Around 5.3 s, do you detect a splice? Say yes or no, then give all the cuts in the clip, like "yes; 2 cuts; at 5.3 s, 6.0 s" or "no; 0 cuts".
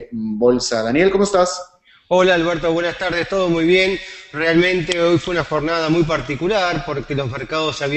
yes; 1 cut; at 5.3 s